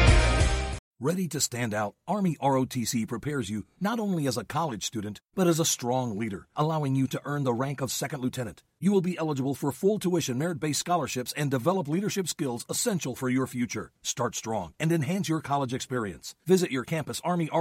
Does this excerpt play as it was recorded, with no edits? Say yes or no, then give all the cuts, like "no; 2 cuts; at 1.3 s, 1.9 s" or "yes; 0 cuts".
yes; 0 cuts